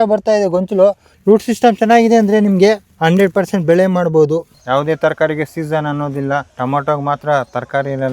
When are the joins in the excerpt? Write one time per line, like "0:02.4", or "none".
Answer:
0:01.1
0:02.9
0:04.5
0:06.5

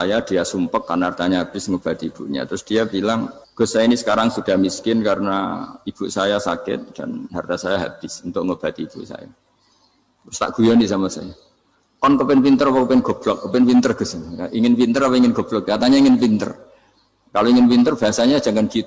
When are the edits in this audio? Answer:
0:03.4

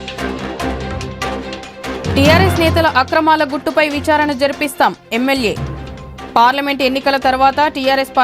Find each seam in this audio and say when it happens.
0:01.0

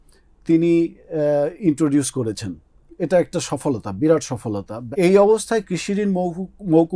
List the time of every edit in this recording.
0:04.9

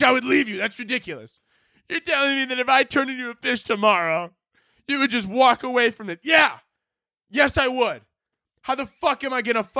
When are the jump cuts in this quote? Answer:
none

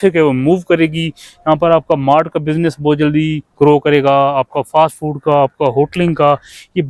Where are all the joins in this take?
none

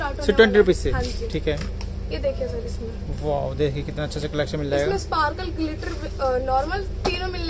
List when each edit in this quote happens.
none

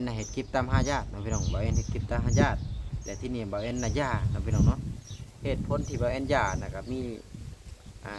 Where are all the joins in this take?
none

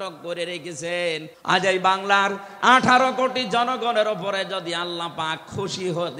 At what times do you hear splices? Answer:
0:01.3

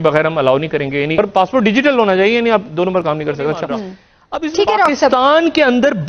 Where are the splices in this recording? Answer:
0:01.2

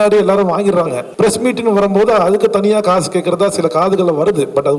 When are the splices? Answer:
0:01.0

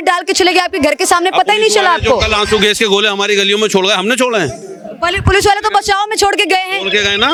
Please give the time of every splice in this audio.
none

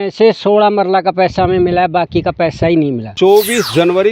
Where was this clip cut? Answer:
0:03.1

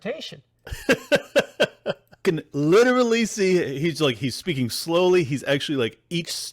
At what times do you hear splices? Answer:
0:02.2

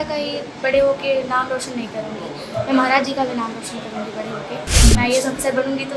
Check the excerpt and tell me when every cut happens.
0:04.8

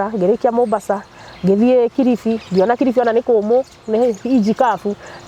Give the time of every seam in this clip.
none

